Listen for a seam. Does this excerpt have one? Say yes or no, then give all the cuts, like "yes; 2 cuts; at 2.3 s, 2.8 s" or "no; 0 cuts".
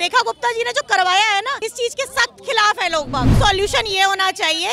yes; 2 cuts; at 1.6 s, 3.3 s